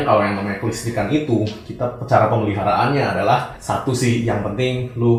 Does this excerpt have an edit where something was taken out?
no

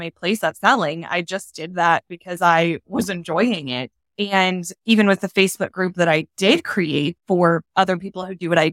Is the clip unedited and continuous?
no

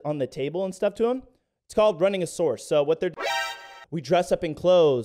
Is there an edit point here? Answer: yes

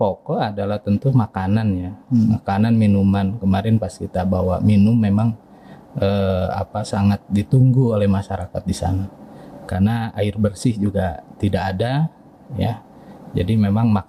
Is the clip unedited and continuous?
yes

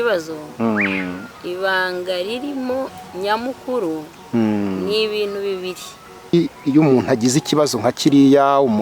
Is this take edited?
yes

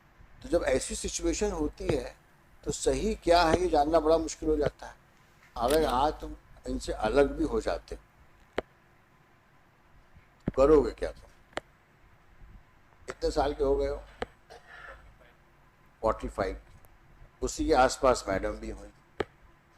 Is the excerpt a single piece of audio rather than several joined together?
no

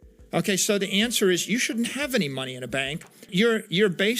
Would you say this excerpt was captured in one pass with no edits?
no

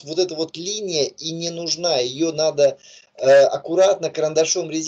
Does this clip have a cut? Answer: no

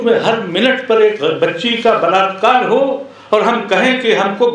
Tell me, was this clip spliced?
no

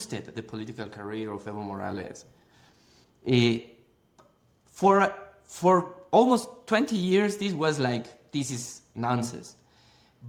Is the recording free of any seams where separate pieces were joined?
yes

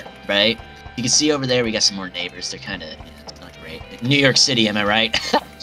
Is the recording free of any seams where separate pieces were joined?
no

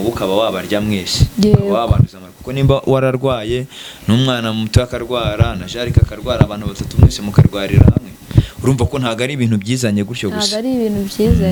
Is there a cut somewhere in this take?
no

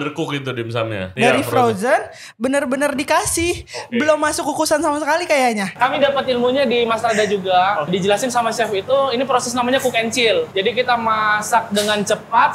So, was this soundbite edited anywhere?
yes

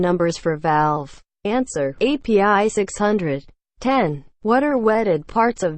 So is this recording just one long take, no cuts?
no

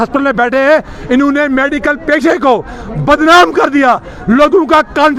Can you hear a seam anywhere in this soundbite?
no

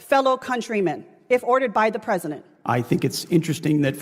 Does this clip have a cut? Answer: no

